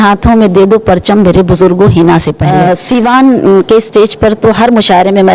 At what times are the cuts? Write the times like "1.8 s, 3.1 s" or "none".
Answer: 2.4 s